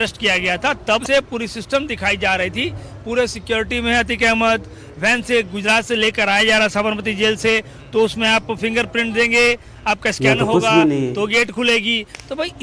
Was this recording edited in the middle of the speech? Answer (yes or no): yes